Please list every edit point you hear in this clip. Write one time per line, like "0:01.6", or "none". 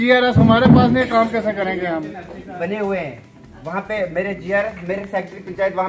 none